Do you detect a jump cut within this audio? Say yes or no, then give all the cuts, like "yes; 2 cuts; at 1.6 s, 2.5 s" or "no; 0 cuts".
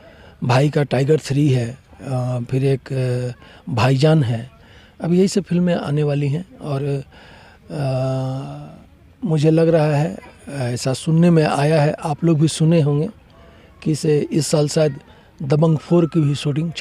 no; 0 cuts